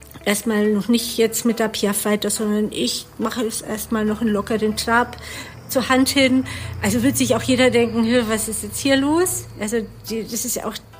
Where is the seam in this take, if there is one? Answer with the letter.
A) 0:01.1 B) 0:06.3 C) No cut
C